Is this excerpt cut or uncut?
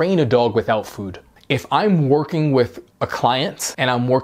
cut